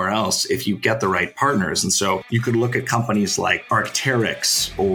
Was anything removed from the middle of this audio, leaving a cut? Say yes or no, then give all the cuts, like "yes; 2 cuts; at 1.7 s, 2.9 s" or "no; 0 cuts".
yes; 2 cuts; at 2.3 s, 3.6 s